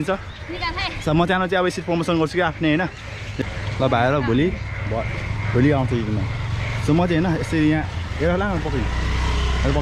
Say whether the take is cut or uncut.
cut